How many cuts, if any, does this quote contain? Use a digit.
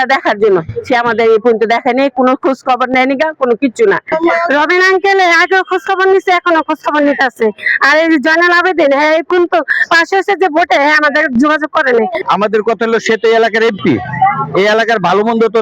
2